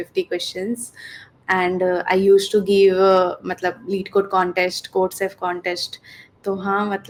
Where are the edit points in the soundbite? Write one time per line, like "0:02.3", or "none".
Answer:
none